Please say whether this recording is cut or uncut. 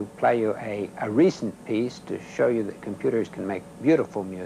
cut